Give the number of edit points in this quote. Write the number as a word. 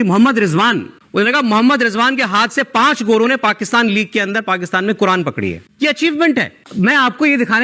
two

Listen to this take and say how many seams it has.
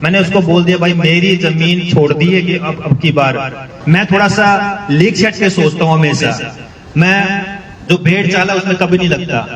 one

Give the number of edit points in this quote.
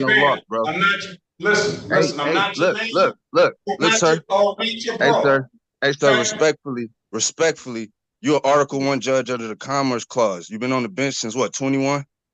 zero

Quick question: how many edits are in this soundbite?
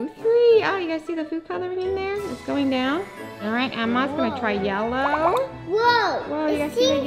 one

